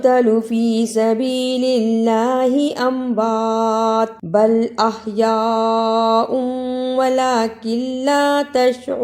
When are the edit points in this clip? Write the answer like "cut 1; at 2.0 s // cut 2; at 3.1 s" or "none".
cut 1; at 4.2 s